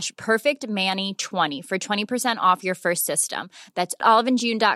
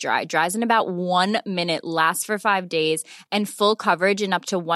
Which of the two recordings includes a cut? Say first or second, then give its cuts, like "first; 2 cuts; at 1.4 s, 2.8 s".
first; 1 cut; at 1.5 s